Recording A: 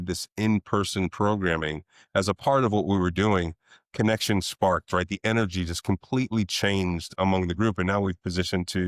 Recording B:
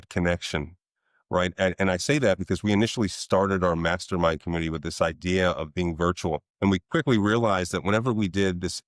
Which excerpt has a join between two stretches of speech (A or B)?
B